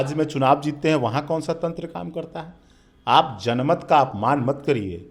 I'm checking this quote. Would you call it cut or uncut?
uncut